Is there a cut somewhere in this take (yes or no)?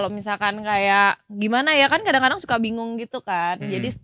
no